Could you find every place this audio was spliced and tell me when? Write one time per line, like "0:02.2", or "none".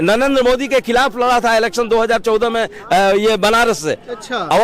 none